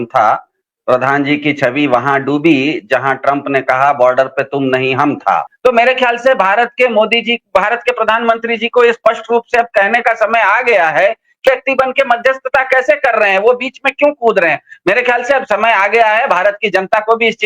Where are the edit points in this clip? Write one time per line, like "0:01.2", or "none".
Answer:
0:05.5